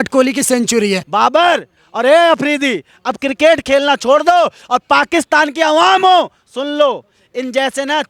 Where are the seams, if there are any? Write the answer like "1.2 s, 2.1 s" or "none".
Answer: 1.0 s